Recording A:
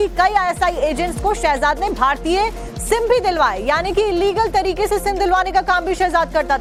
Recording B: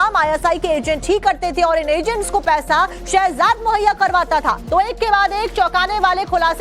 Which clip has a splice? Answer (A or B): B